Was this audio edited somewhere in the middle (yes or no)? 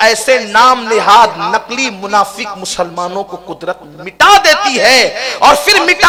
no